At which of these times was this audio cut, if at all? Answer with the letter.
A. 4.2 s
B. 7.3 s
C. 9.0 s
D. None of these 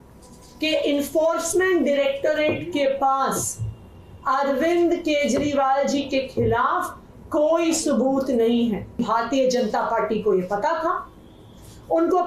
C